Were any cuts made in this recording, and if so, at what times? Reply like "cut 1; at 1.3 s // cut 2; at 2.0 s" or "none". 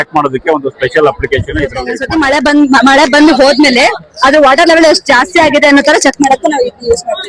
cut 1; at 1.9 s